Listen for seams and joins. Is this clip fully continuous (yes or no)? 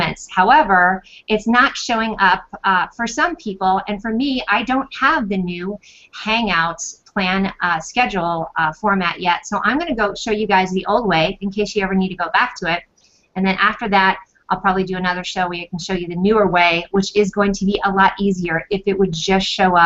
yes